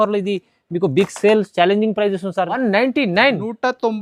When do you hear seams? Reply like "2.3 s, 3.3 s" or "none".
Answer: 2.6 s